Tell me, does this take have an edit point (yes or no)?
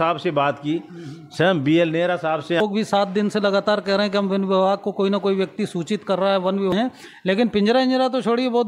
yes